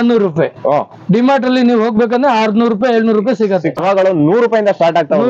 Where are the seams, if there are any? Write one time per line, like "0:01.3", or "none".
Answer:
0:03.8

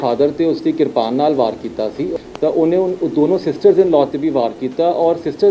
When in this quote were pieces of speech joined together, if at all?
0:02.1

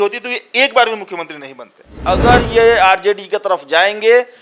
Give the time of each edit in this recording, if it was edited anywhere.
0:01.9

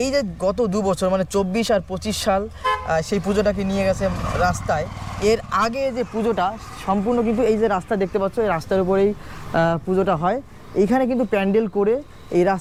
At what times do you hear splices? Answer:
none

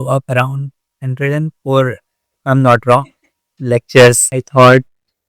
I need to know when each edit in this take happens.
0:04.3

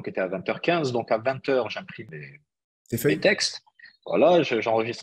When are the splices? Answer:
0:02.1

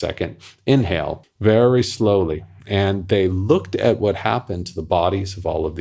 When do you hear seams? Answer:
0:01.3

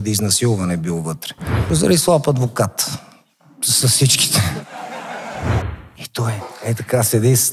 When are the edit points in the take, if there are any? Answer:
0:01.6
0:05.7

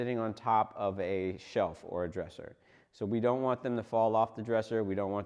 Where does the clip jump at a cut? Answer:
none

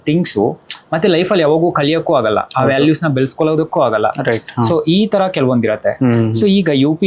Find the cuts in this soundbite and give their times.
none

